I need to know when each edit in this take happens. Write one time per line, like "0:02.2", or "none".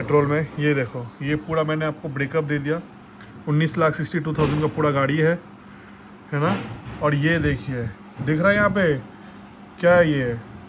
none